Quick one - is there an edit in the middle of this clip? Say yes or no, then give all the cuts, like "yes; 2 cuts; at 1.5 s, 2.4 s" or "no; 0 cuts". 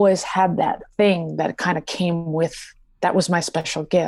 no; 0 cuts